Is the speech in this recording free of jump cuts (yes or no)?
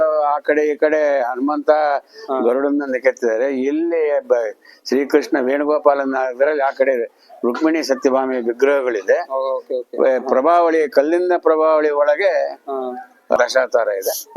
no